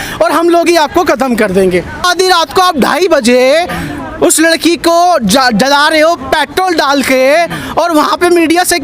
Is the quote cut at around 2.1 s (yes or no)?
yes